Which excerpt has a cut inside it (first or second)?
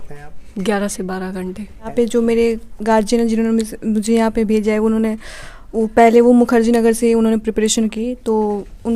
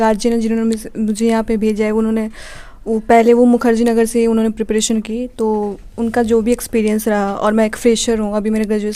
first